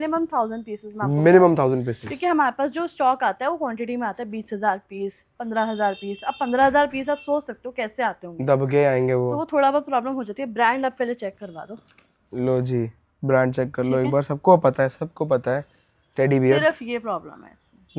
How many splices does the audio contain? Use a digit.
0